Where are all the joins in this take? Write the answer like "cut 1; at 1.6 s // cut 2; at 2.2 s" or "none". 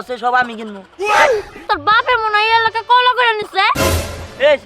cut 1; at 1.5 s // cut 2; at 3.8 s

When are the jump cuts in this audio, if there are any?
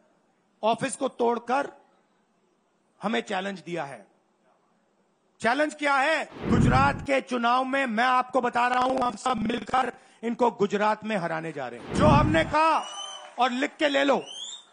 cut 1; at 6.3 s // cut 2; at 11.8 s

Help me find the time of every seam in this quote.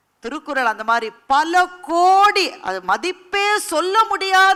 none

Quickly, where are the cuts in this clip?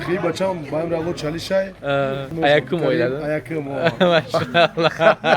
cut 1; at 2.3 s

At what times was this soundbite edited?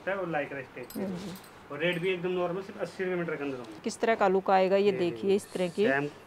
cut 1; at 3.9 s

